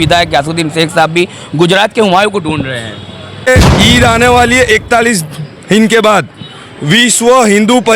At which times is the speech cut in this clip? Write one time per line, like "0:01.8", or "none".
0:03.5